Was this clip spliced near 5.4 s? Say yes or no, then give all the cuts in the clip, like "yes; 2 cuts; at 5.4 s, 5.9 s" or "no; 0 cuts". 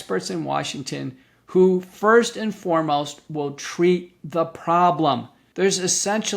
yes; 1 cut; at 5.4 s